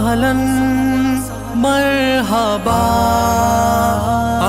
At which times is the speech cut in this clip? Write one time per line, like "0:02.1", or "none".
none